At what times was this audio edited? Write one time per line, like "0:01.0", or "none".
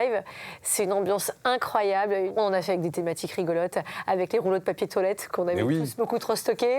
0:02.3